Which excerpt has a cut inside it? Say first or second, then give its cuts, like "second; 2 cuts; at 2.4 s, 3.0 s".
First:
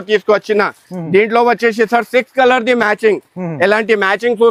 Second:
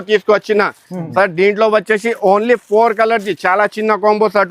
second; 1 cut; at 0.9 s